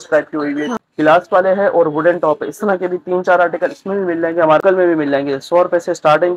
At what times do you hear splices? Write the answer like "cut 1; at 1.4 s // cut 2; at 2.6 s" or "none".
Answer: cut 1; at 0.8 s // cut 2; at 4.6 s

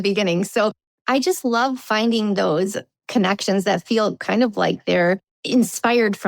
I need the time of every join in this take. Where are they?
cut 1; at 5.3 s

